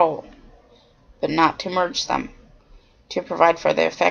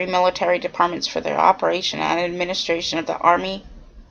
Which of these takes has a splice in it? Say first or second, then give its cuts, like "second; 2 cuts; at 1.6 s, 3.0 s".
first; 1 cut; at 1.5 s